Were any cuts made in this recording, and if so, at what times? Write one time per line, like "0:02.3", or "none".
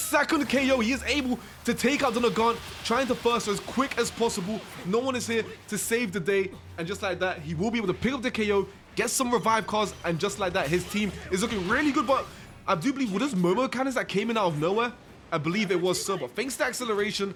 none